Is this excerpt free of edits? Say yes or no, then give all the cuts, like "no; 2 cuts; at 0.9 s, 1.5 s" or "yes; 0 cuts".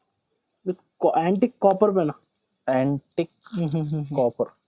yes; 0 cuts